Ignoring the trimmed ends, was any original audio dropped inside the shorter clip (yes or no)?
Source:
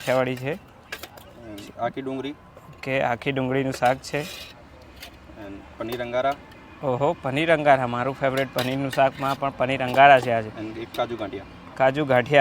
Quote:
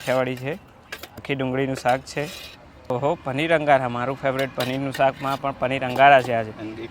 yes